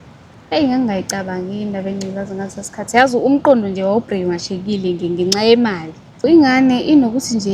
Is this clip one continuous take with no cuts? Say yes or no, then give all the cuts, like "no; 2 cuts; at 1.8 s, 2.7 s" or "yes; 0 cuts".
no; 1 cut; at 6.3 s